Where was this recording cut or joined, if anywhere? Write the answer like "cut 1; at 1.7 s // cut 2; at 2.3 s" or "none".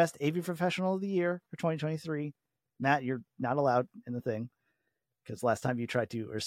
none